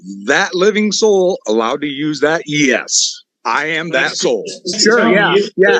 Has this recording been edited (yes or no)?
yes